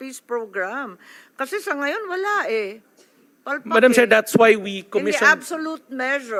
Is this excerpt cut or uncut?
uncut